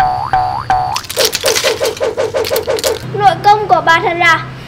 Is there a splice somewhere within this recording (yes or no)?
yes